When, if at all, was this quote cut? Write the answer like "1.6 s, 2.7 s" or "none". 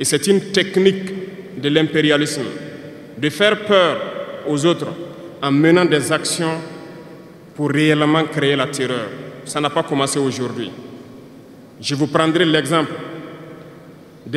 none